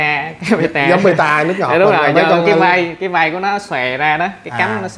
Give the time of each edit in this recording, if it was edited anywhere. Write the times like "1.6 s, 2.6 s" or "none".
none

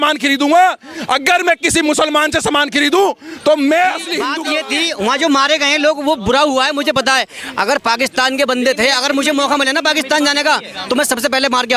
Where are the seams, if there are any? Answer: 4.3 s

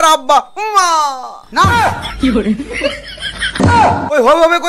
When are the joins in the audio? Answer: 3.5 s

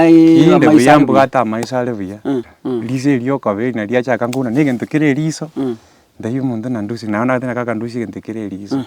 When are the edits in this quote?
2.5 s

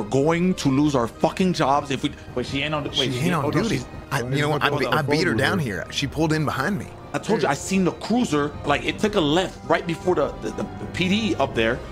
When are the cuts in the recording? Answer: 3.9 s, 6.9 s, 8.6 s

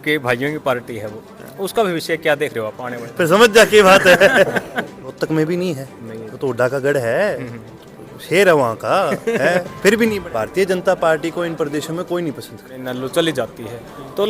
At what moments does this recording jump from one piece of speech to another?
3.0 s, 5.0 s, 10.2 s, 12.8 s

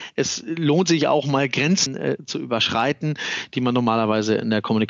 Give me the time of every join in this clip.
1.8 s

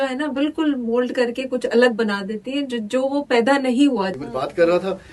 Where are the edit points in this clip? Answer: 4.1 s

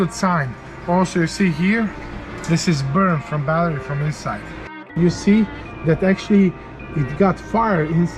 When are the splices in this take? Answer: 4.8 s

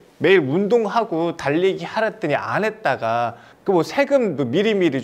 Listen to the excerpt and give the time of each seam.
3.5 s

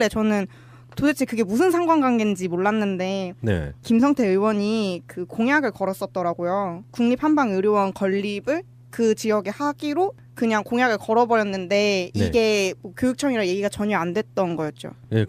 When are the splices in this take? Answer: none

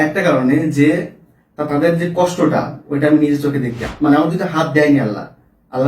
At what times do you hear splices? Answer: 3.8 s

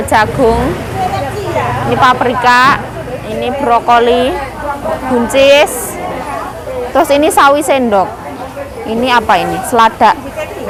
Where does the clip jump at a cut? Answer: none

